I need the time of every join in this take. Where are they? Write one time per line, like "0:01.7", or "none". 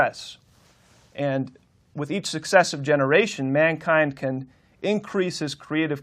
0:04.4

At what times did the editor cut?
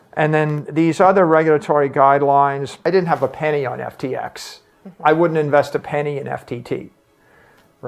0:02.7

